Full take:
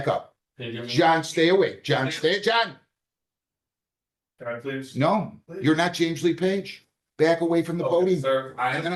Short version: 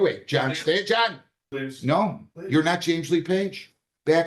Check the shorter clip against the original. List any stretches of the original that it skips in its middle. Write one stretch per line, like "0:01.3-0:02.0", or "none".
0:03.0-0:04.6